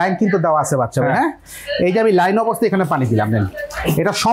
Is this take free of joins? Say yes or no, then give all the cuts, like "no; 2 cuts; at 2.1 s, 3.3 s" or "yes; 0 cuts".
yes; 0 cuts